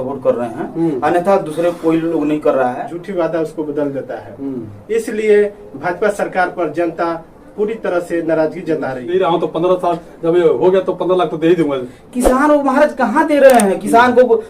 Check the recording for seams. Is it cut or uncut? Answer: cut